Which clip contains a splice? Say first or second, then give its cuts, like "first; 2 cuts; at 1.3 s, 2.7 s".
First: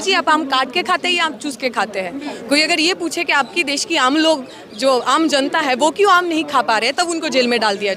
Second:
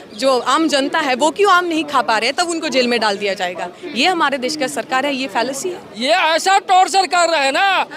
second; 1 cut; at 5.8 s